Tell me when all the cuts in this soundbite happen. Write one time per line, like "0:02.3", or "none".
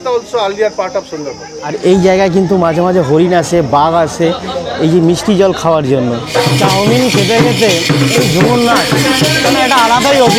0:01.5
0:06.3